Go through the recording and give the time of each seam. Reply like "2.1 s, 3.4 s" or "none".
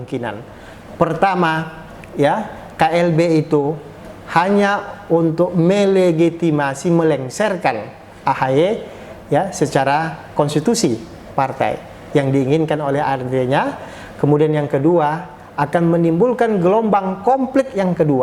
none